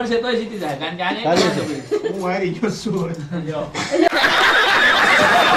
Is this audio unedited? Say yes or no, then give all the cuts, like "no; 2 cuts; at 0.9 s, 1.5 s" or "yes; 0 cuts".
yes; 0 cuts